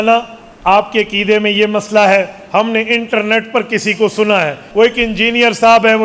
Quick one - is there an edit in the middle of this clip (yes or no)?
yes